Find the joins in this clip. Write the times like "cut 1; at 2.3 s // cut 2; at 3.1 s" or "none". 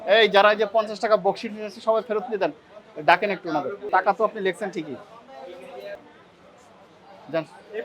cut 1; at 3.8 s // cut 2; at 6.0 s